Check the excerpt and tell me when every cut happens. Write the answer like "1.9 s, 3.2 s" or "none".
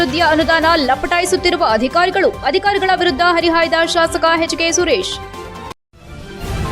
5.6 s